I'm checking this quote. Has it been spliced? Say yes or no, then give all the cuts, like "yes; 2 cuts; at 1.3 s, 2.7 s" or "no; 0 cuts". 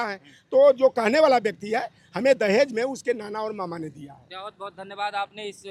no; 0 cuts